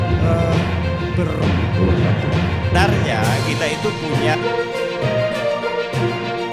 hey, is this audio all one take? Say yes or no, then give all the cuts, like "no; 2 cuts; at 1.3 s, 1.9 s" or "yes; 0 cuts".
yes; 0 cuts